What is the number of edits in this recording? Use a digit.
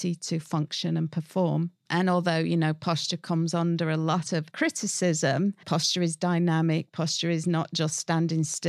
3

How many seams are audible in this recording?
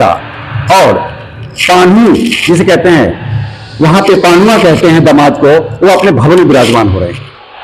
0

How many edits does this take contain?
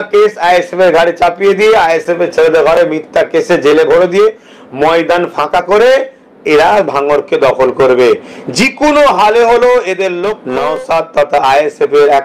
1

